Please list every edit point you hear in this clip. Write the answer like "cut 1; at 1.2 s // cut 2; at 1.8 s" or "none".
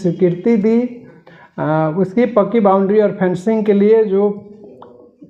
none